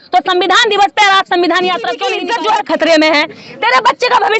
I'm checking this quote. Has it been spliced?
yes; 1 cut; at 2.2 s

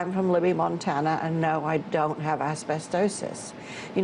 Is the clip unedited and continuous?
yes; 0 cuts

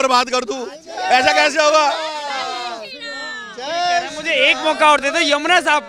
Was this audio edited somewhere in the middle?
no; 0 cuts

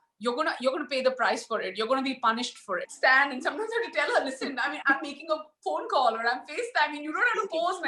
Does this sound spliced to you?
yes; 1 cut; at 2.9 s

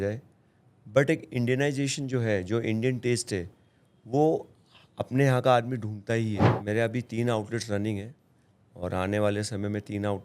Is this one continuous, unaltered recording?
no; 1 cut; at 6.5 s

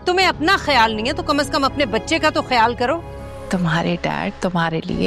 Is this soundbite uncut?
no; 1 cut; at 3.3 s

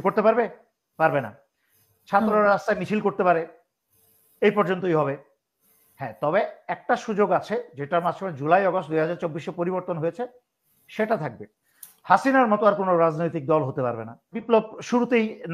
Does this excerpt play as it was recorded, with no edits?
no; 1 cut; at 14.4 s

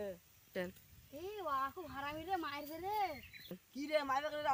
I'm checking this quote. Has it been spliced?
no; 0 cuts

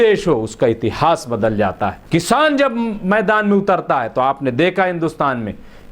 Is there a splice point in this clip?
yes; 1 cut; at 2.0 s

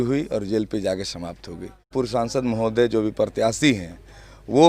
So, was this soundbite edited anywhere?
yes; 1 cut; at 1.9 s

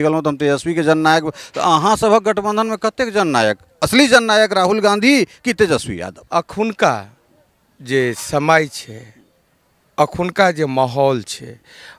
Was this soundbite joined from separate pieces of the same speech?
yes; 1 cut; at 6.2 s

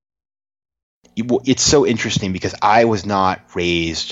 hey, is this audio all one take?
no; 1 cut; at 1.0 s

